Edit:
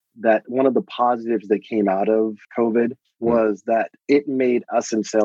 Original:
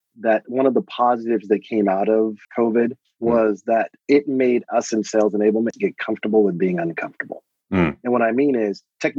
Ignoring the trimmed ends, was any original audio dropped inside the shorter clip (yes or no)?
no